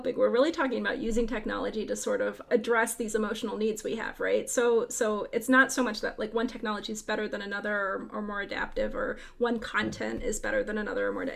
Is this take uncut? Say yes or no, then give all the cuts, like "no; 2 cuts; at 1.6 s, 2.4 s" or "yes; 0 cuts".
no; 1 cut; at 2.4 s